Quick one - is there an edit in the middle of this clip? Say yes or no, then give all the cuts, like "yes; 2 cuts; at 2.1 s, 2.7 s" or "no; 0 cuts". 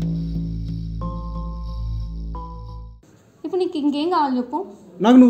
no; 0 cuts